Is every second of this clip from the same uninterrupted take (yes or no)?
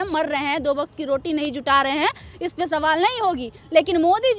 yes